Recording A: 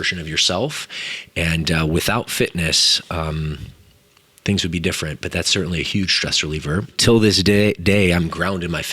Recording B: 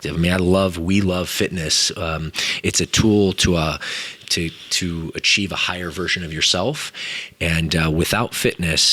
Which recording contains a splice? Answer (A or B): A